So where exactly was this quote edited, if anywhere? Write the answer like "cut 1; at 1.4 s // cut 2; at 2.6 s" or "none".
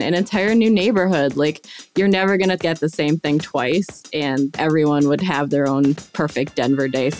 cut 1; at 4.5 s // cut 2; at 6.0 s